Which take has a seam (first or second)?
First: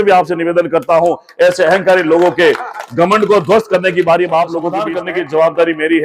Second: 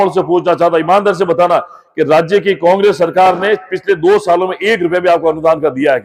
first